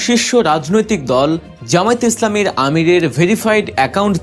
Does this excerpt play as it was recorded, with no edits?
no; 1 cut; at 1.5 s

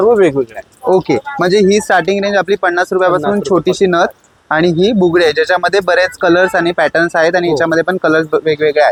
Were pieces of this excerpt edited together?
no; 0 cuts

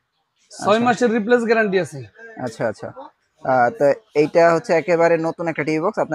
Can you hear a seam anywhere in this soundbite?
no; 0 cuts

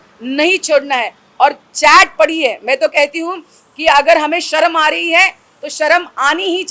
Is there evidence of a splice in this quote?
no; 0 cuts

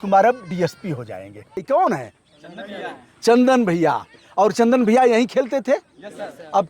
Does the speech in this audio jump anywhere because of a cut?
yes; 1 cut; at 1.6 s

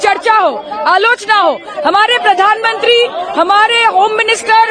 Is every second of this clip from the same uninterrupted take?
yes; 0 cuts

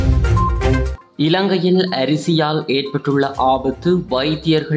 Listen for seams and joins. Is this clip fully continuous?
yes; 0 cuts

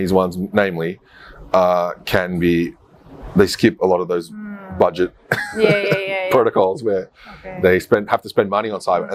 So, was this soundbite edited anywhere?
no; 0 cuts

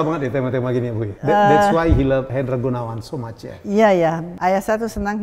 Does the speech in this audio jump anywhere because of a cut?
yes; 3 cuts; at 1.1 s, 2.3 s, 4.3 s

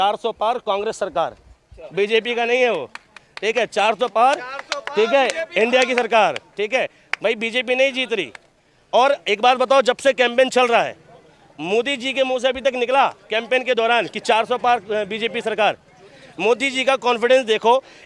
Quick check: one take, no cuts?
yes; 0 cuts

